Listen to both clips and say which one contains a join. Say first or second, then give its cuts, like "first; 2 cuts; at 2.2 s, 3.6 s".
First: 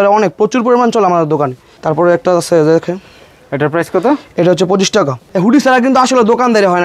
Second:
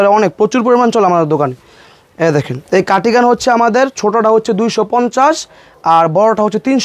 first; 2 cuts; at 1.7 s, 5.2 s